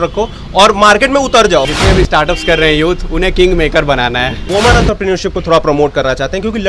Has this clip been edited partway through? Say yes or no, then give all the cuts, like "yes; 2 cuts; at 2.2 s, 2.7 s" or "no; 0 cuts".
yes; 2 cuts; at 1.7 s, 4.4 s